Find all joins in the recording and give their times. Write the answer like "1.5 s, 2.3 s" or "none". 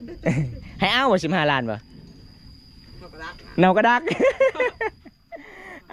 none